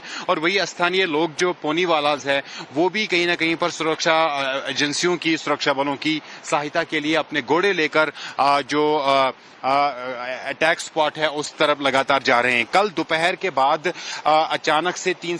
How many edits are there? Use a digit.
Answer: 1